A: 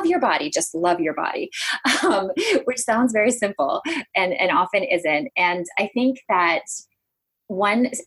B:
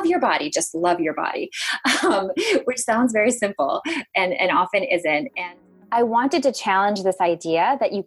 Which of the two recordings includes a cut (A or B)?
B